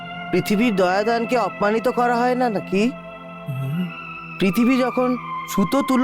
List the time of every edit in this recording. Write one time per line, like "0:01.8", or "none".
0:04.1